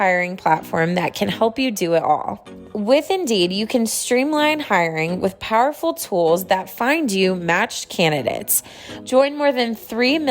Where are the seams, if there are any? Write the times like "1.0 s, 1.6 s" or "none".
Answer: 8.9 s